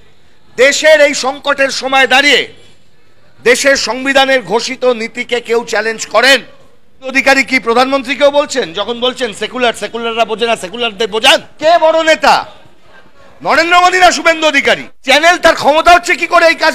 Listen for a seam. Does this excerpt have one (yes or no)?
yes